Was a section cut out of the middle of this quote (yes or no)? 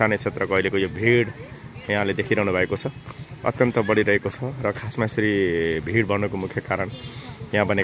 no